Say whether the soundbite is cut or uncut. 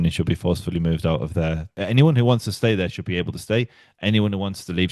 cut